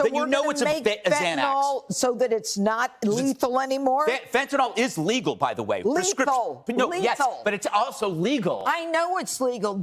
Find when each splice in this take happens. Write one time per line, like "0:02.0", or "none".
none

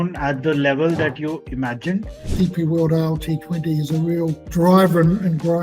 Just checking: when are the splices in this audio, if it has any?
0:02.2

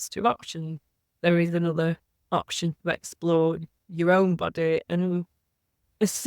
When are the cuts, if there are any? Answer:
0:04.9

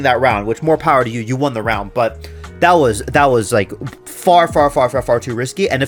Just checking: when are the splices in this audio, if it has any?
none

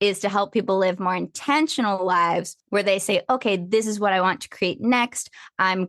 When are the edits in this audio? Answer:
0:02.5

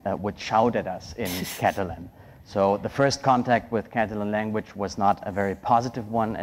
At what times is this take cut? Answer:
0:05.3

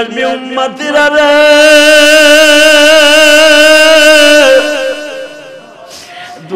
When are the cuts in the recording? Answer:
none

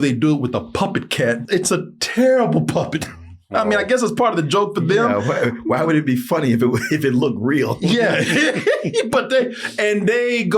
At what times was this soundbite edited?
0:01.4

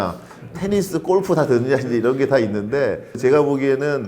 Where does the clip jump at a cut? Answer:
0:03.1

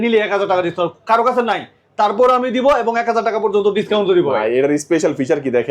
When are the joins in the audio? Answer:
none

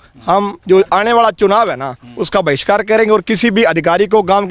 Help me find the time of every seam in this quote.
none

